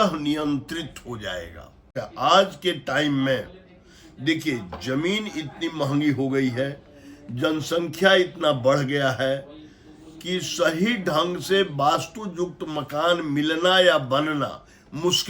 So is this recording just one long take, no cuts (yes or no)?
no